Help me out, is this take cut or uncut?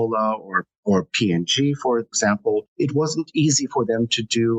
cut